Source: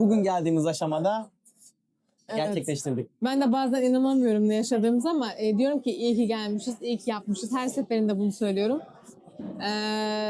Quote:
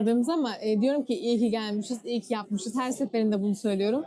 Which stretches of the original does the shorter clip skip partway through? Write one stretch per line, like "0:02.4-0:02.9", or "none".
none